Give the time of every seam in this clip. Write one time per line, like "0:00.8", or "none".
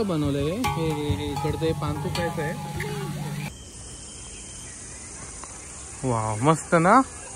0:03.5